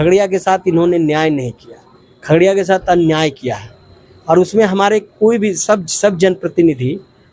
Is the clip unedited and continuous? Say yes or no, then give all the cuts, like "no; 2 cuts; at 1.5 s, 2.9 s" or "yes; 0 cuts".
yes; 0 cuts